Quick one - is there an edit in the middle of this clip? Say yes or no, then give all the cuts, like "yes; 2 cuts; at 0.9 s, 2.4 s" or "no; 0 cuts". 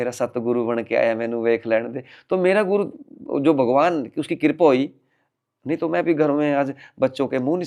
no; 0 cuts